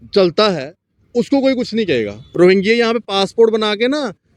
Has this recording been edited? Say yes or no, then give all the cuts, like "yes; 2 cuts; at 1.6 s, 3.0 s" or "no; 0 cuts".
yes; 1 cut; at 2.2 s